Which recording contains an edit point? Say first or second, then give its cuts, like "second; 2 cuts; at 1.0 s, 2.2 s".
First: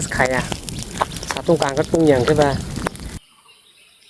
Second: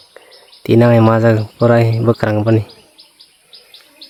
first; 1 cut; at 3.2 s